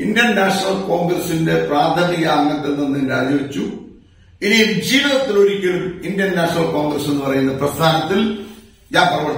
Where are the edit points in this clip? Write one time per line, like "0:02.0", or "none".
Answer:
none